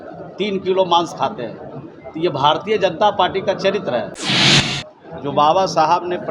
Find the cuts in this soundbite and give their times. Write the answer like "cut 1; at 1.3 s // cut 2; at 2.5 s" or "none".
cut 1; at 4.5 s